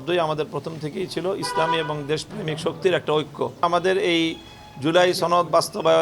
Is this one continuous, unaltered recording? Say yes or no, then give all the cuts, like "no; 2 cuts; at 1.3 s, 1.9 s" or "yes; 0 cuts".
no; 1 cut; at 3.6 s